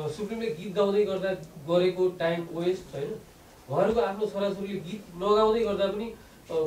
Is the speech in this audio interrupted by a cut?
no; 0 cuts

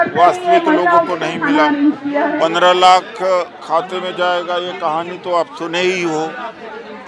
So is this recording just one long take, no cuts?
yes; 0 cuts

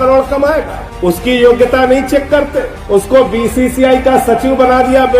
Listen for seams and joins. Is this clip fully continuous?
yes; 0 cuts

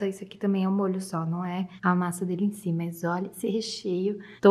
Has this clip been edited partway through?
no; 0 cuts

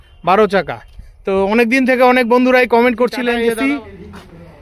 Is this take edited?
yes; 1 cut; at 3.3 s

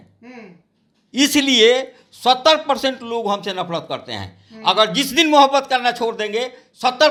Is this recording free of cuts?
yes; 0 cuts

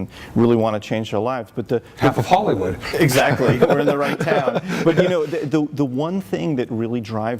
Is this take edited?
no; 0 cuts

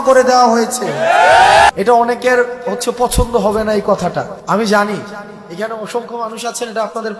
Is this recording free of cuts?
no; 2 cuts; at 1.7 s, 4.4 s

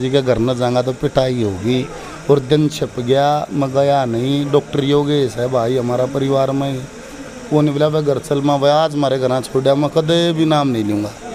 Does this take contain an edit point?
no; 0 cuts

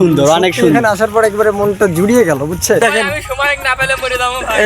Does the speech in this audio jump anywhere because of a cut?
yes; 1 cut; at 2.8 s

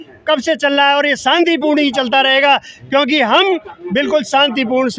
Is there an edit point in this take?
no; 0 cuts

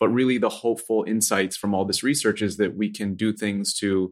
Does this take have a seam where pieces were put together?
no; 0 cuts

